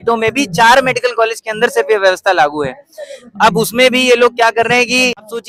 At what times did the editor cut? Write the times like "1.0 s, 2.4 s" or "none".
none